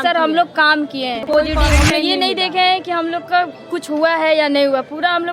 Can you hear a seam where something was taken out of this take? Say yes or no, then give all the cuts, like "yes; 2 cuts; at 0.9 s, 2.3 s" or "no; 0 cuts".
yes; 1 cut; at 1.3 s